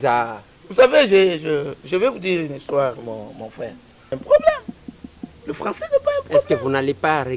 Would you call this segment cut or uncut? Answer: cut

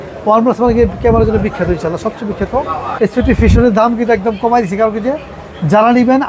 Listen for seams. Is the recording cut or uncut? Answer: cut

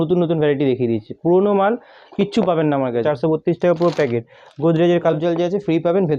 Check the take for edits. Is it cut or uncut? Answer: cut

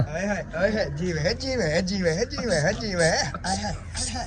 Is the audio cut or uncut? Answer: uncut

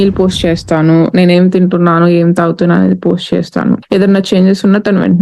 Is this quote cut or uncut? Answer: cut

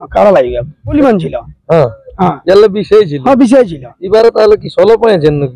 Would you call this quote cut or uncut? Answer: cut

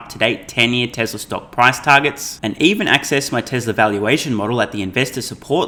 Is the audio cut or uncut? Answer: uncut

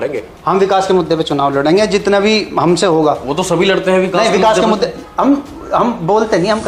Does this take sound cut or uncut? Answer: uncut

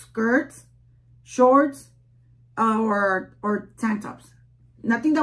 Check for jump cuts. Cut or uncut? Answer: uncut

